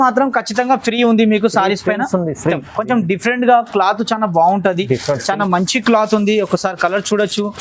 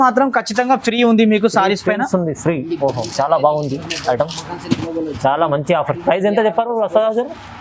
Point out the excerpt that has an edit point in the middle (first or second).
first